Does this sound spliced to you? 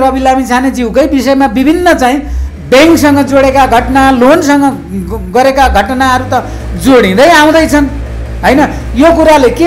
no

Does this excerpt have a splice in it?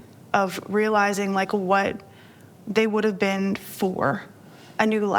no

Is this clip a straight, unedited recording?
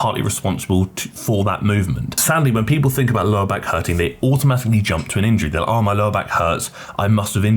no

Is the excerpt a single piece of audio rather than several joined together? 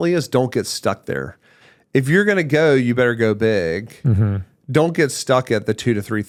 yes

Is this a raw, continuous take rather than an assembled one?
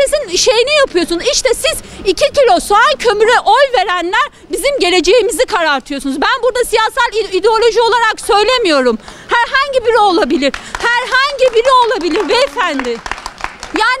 yes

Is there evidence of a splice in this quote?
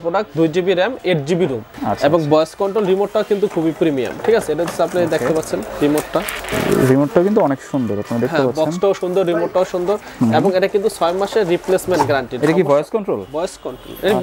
yes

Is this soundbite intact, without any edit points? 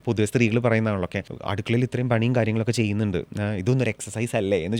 yes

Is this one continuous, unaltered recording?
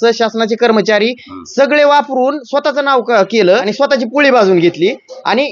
no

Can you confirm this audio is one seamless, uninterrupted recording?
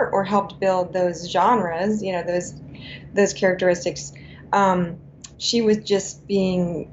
yes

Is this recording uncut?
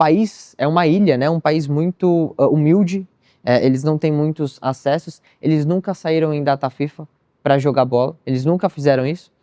yes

